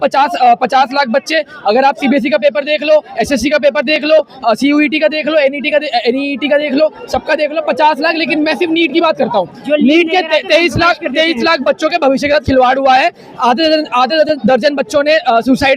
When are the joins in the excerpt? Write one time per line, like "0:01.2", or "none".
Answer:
none

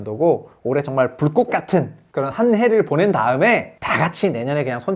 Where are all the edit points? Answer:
0:02.0
0:03.8

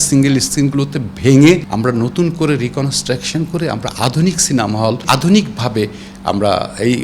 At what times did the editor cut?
0:01.7
0:05.0

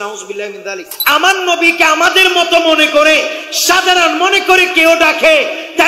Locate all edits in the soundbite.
0:00.9

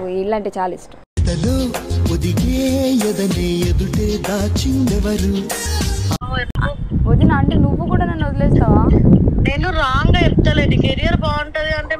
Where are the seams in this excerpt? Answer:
0:06.2

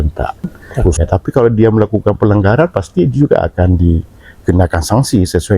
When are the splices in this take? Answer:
0:01.0

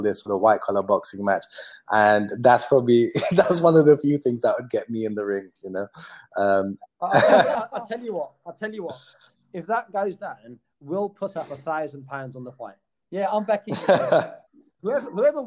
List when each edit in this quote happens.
0:07.6

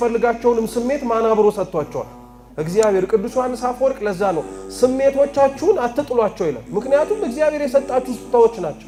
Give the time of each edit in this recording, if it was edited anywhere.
none

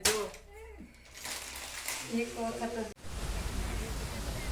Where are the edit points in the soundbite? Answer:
0:02.9

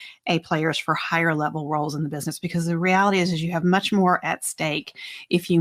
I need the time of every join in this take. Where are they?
none

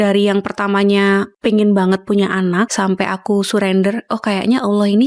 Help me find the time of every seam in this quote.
0:01.3
0:02.7

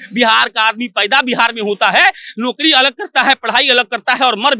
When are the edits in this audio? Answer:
none

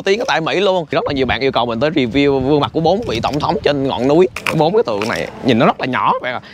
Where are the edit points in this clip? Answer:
0:00.9
0:04.4

